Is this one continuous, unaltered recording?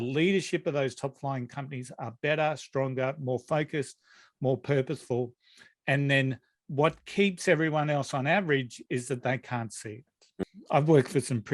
no; 1 cut; at 10.4 s

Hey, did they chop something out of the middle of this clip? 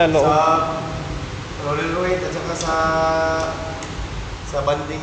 no; 0 cuts

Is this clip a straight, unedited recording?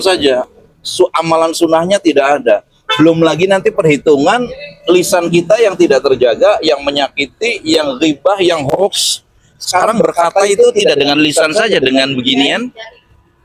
yes; 0 cuts

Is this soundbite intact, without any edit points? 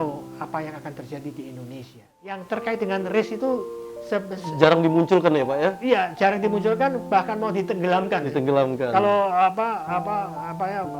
no; 1 cut; at 2.4 s

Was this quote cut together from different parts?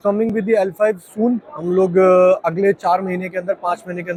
no; 0 cuts

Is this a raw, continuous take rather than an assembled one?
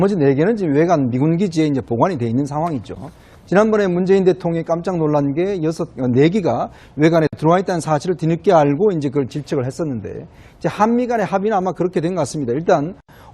no; 1 cut; at 10.4 s

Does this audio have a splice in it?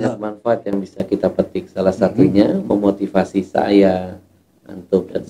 no; 0 cuts

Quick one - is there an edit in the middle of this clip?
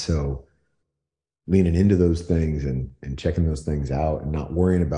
no; 0 cuts

